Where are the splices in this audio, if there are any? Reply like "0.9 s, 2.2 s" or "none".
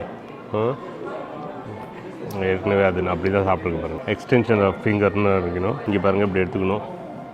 3.9 s, 5.8 s